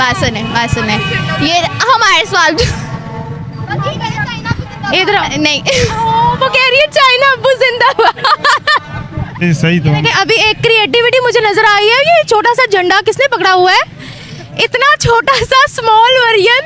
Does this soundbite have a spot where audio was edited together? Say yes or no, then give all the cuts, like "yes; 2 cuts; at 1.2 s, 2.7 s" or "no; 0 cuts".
yes; 1 cut; at 9.4 s